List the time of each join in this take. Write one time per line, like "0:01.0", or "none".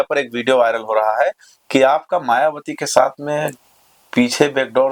none